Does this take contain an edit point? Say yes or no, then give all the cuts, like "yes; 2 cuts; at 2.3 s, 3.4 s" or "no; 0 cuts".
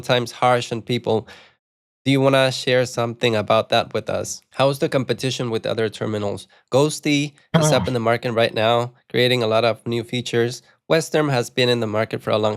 yes; 1 cut; at 4.4 s